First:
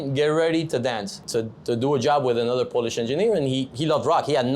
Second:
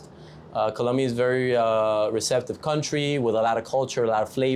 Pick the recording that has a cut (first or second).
first